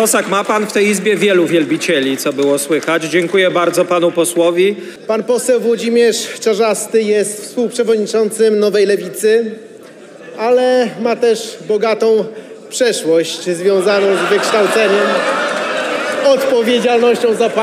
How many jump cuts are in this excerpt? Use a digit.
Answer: 1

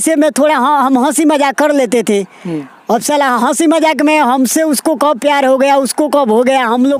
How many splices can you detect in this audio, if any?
0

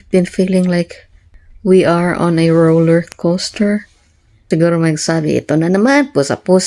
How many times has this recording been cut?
1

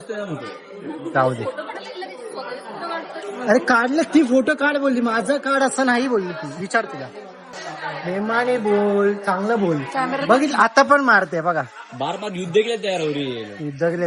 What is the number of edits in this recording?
1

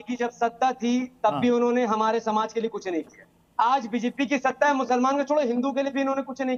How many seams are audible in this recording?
0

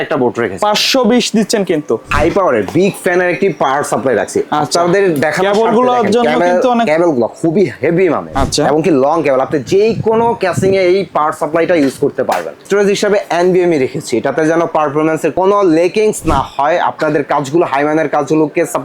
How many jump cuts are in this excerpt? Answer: 4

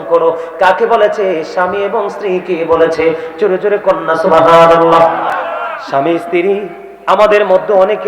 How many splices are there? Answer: 1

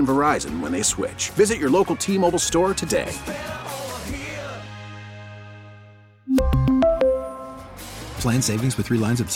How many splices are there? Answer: 0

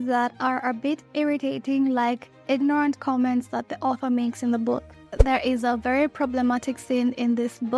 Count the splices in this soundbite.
1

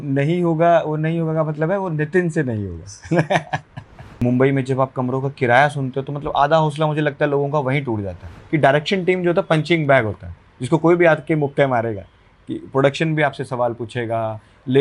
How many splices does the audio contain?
2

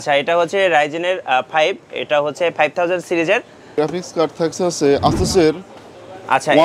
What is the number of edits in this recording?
1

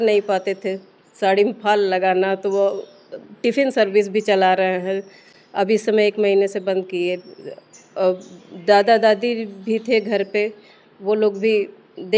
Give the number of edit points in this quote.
0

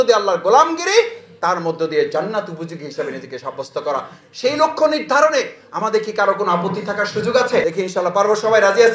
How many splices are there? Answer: 1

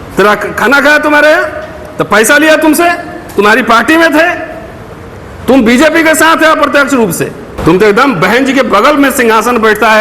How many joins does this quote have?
1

